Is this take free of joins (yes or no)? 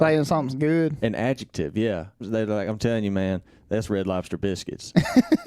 no